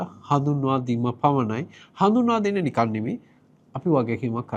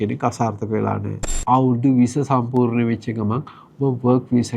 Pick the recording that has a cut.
second; 1 cut; at 1.3 s

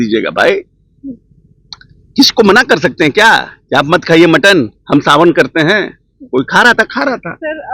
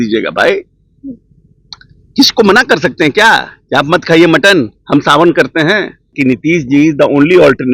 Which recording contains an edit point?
second; 1 cut; at 6.1 s

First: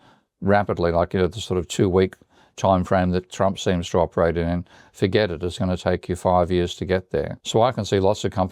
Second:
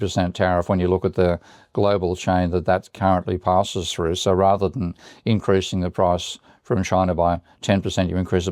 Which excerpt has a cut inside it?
first; 1 cut; at 7.4 s

